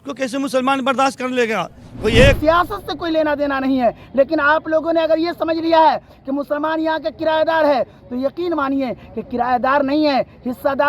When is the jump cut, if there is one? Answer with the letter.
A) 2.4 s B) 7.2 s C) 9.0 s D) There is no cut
A